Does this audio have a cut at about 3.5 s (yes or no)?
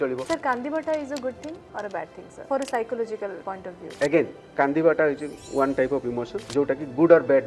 yes